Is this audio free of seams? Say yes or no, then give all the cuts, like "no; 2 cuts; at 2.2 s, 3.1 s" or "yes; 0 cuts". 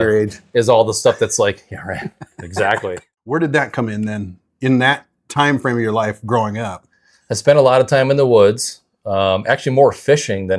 no; 1 cut; at 3.1 s